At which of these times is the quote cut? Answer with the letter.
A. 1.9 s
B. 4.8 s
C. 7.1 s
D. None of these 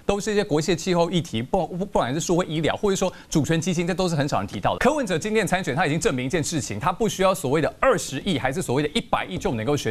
B